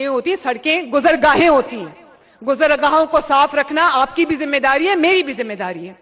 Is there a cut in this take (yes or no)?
no